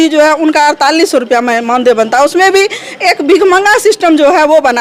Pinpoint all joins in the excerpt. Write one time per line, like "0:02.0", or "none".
none